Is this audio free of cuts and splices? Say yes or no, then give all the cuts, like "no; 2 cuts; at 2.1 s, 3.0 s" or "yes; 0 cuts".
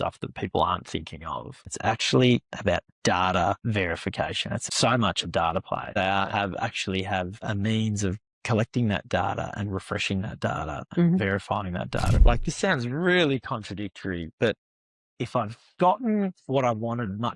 no; 4 cuts; at 1.7 s, 4.5 s, 6.0 s, 12.1 s